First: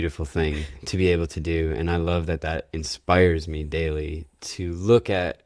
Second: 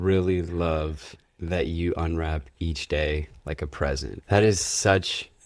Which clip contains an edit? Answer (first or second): second